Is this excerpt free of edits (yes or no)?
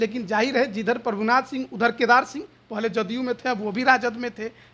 yes